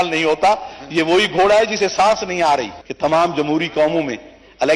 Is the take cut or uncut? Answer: cut